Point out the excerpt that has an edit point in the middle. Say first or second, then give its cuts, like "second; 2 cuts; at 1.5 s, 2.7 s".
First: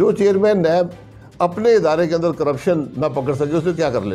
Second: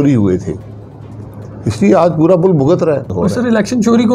second; 1 cut; at 3.1 s